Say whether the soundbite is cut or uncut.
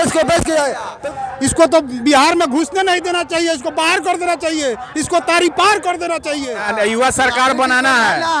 cut